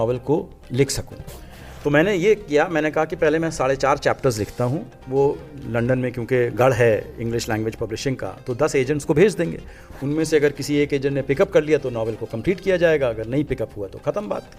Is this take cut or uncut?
uncut